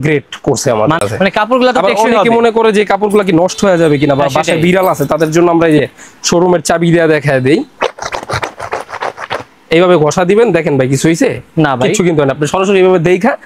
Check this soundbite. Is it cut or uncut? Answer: cut